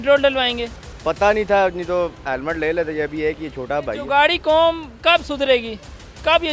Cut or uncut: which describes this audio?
uncut